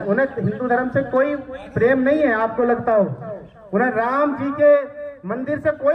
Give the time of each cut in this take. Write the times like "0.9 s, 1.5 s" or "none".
none